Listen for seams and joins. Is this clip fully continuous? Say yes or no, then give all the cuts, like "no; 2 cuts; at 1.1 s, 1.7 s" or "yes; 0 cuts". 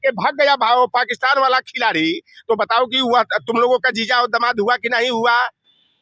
yes; 0 cuts